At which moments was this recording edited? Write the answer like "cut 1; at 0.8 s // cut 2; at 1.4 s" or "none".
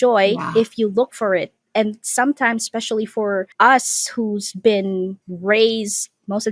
cut 1; at 3.5 s // cut 2; at 5.2 s